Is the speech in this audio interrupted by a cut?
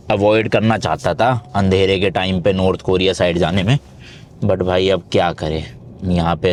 no; 0 cuts

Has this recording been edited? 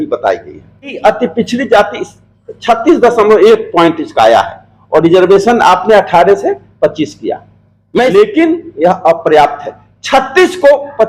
yes; 2 cuts; at 0.9 s, 8.1 s

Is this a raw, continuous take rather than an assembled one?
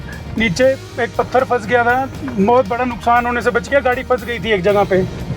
yes; 0 cuts

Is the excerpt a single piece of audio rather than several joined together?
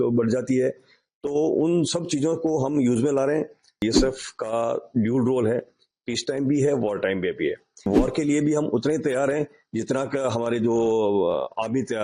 no; 2 cuts; at 3.8 s, 7.9 s

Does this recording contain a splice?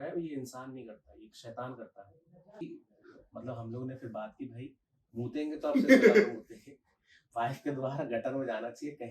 yes; 1 cut; at 2.6 s

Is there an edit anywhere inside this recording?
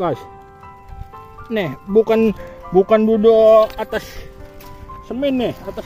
no; 0 cuts

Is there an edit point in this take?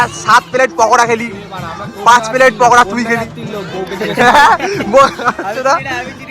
yes; 2 cuts; at 1.4 s, 3.4 s

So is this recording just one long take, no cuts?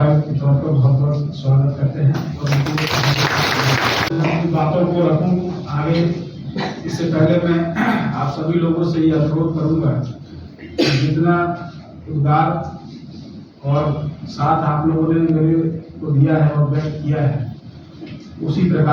no; 1 cut; at 4.1 s

